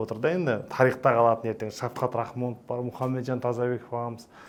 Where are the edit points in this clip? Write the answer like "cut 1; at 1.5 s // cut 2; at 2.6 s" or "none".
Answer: none